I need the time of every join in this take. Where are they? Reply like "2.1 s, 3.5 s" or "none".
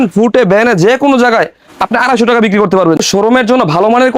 3.0 s